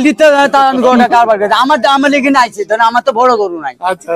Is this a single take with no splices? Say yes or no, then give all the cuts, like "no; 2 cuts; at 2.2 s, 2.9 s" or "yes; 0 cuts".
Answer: yes; 0 cuts